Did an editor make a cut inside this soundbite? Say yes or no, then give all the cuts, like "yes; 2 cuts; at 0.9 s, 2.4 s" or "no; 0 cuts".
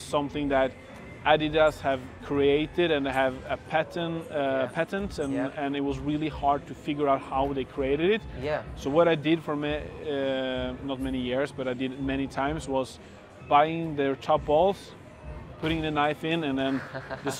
no; 0 cuts